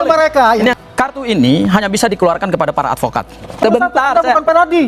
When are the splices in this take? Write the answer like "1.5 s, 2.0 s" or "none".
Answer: 0.7 s, 3.6 s

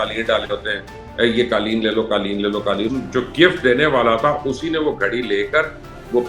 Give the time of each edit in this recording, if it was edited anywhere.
2.9 s

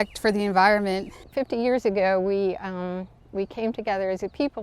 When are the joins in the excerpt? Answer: 1.2 s

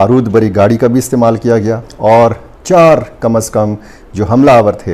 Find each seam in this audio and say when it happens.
1.8 s

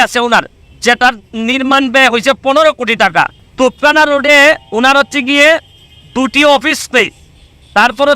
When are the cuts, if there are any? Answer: none

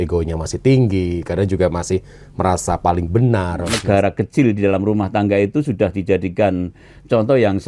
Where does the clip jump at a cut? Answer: 3.7 s

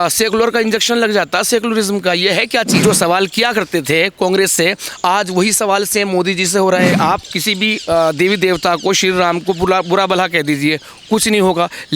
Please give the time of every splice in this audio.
2.8 s, 6.9 s

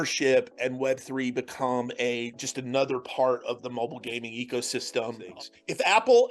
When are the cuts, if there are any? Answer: 5.2 s

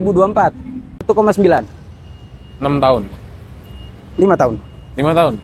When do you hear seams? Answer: 1.0 s

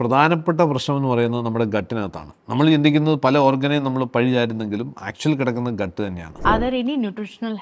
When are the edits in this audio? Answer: 6.3 s

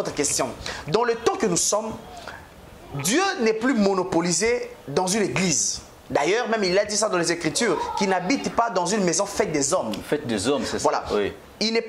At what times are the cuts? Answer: none

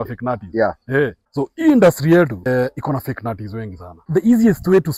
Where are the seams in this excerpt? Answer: 1.2 s, 2.5 s, 4.0 s

